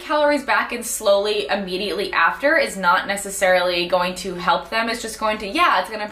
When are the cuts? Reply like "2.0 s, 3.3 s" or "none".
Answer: none

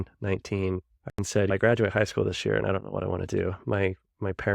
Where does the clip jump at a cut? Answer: 0.9 s

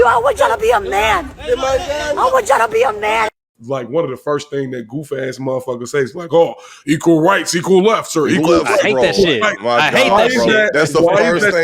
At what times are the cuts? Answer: 3.5 s, 10.1 s

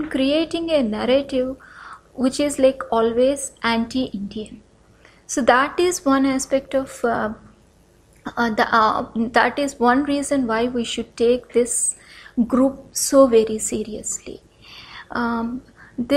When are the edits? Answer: none

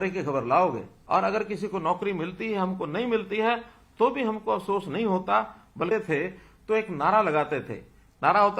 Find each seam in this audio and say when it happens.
0.9 s, 5.9 s

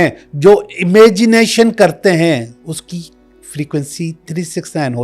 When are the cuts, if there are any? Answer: 2.6 s

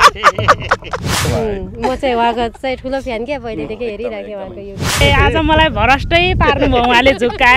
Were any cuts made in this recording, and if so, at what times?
1.2 s, 5.0 s

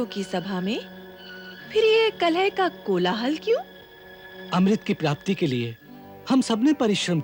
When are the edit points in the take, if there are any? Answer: none

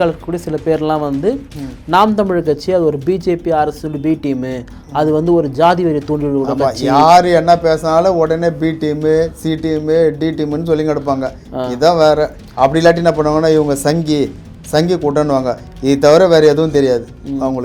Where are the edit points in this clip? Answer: none

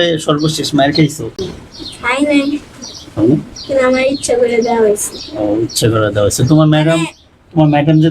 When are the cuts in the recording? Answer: 1.6 s

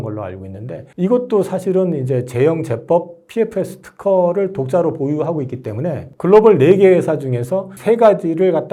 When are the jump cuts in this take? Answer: none

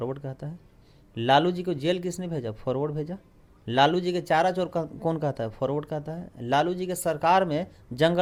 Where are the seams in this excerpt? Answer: none

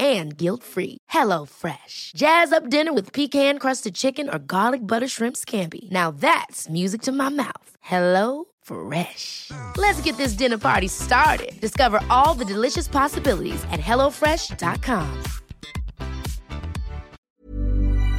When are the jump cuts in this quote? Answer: 17.2 s

